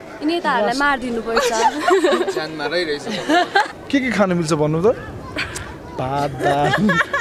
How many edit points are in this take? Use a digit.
1